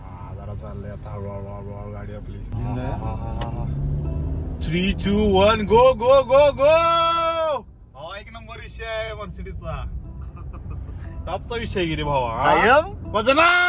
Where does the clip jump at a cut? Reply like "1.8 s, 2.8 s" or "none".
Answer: 2.5 s